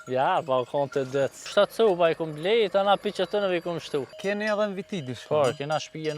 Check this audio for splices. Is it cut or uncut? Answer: cut